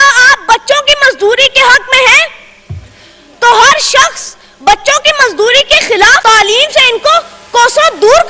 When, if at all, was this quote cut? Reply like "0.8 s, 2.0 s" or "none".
6.2 s